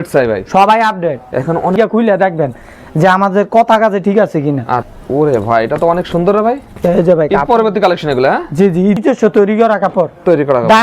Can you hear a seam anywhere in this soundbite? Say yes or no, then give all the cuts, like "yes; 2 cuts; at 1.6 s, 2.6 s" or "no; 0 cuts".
yes; 3 cuts; at 1.8 s, 4.9 s, 9.0 s